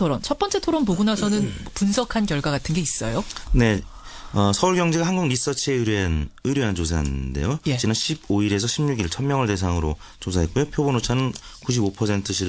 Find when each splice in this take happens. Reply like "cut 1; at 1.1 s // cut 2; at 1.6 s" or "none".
cut 1; at 10.5 s